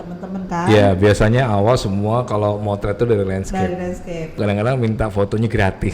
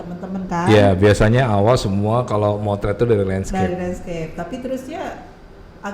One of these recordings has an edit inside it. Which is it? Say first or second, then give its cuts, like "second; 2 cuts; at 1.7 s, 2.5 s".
first; 1 cut; at 4.4 s